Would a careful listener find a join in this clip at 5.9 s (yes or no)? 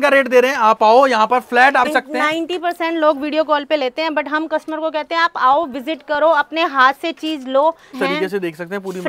no